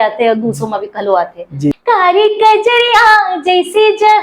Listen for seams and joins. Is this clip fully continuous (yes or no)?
no